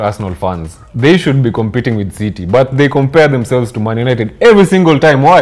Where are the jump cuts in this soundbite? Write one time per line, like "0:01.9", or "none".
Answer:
none